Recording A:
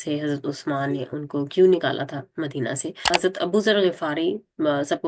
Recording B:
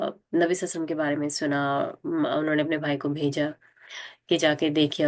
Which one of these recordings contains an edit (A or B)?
A